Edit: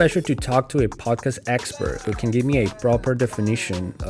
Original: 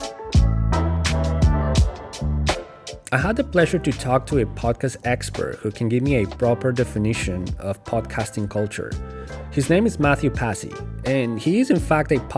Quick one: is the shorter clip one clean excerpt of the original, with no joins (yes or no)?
yes